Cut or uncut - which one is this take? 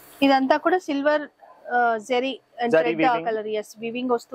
uncut